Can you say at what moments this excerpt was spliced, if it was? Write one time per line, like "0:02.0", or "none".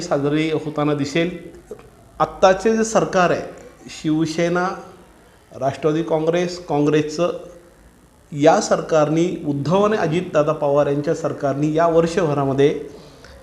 0:01.5